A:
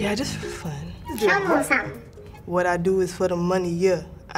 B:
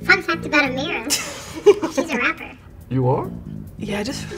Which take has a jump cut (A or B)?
A